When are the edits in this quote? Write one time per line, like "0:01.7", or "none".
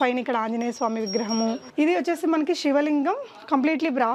0:01.6